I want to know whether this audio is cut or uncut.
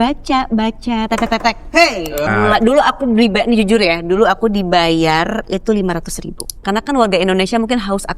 cut